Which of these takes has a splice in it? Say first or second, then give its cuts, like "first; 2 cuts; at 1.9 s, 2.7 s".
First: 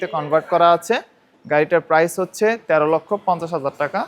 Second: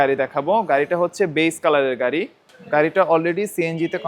second; 1 cut; at 2.4 s